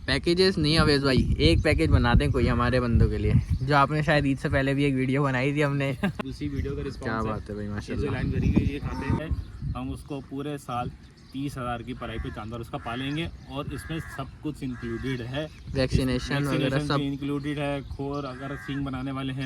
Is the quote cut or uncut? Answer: cut